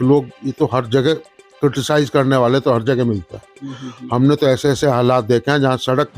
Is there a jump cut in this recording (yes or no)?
no